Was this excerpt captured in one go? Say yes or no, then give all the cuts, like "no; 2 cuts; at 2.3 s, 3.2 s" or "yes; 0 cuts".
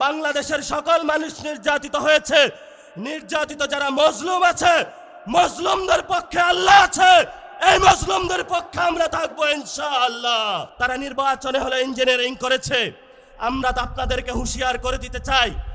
no; 1 cut; at 10.7 s